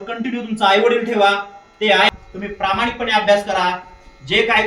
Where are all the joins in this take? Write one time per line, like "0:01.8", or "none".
0:02.1

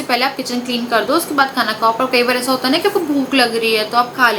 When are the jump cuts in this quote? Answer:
none

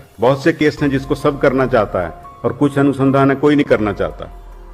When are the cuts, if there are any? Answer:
none

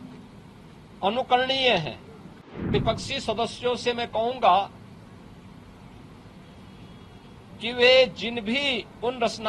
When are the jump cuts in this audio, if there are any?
0:02.7

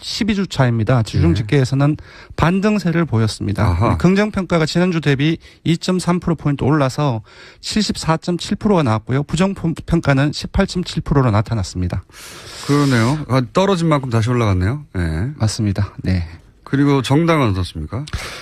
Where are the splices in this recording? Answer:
none

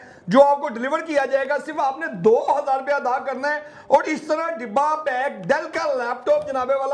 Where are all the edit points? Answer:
none

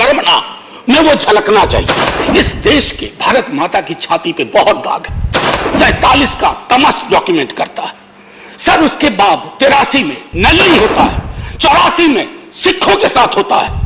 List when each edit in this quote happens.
0:02.2

